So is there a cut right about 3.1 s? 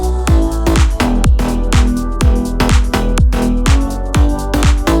no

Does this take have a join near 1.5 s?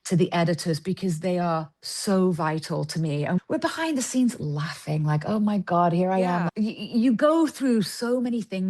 no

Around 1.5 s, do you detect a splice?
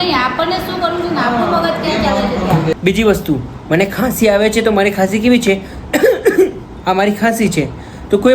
no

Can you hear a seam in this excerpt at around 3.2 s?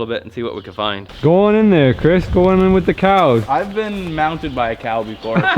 no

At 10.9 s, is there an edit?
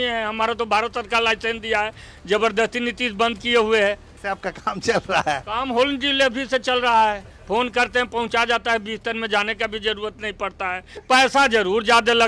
yes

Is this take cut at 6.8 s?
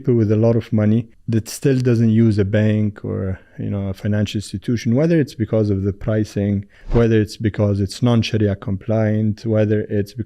yes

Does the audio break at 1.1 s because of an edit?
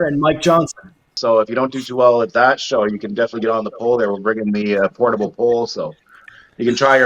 yes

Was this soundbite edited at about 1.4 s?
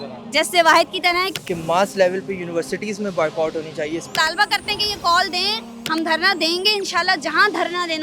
yes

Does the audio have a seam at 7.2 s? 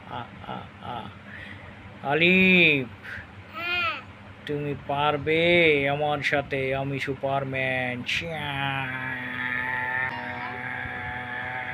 no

